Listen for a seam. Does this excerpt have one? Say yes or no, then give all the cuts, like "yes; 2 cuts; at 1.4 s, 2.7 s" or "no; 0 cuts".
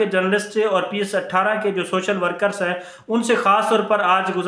no; 0 cuts